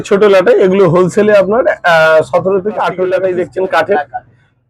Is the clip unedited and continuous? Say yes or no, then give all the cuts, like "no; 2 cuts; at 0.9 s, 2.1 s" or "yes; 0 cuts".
no; 1 cut; at 3.2 s